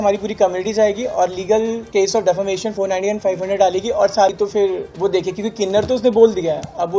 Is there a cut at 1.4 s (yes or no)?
no